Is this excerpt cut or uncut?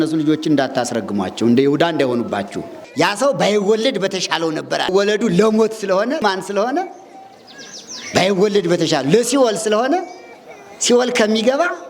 cut